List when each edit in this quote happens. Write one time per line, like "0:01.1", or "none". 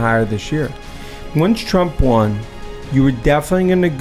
0:01.2